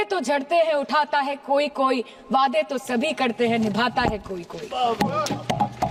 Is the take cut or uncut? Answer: uncut